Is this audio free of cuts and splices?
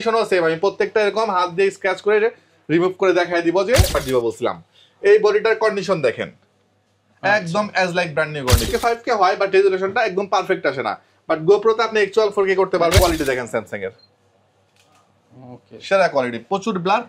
no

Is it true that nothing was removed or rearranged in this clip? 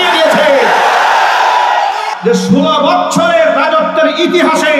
no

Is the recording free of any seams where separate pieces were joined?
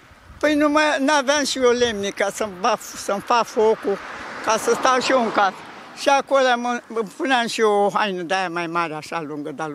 yes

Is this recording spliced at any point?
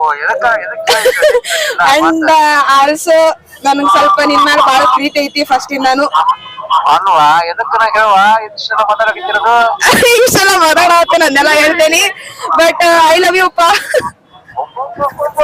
no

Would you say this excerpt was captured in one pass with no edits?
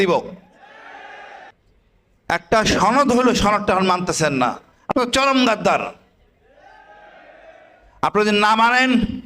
no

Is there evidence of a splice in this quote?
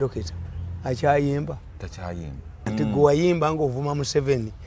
yes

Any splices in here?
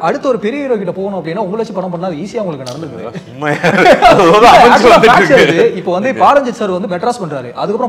no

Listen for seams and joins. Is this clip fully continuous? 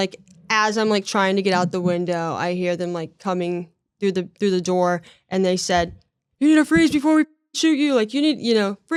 yes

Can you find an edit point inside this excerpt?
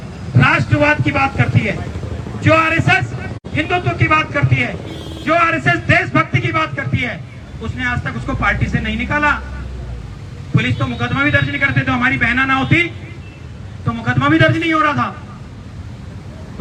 no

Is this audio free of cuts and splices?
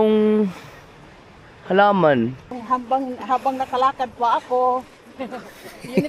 no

